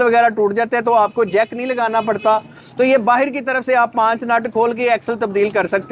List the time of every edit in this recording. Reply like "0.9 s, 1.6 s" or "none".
none